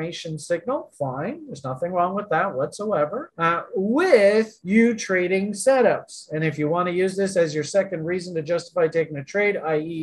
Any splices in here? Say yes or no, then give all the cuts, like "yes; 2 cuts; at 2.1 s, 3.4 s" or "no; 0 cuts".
yes; 1 cut; at 3.3 s